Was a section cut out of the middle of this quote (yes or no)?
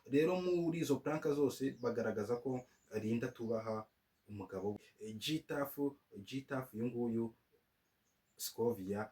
yes